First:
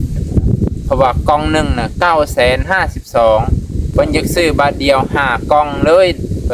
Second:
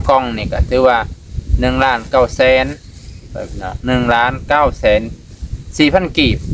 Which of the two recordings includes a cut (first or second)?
first